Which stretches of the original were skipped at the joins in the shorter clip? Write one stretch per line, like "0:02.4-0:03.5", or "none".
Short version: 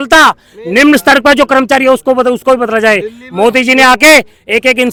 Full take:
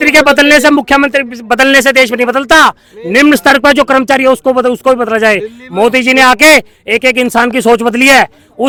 none